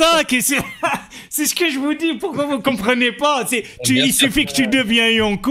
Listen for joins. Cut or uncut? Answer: uncut